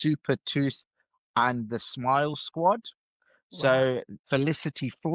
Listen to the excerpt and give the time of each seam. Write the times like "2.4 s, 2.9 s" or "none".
4.2 s